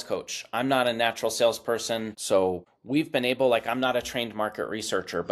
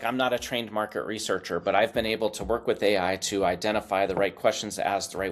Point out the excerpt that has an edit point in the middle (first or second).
first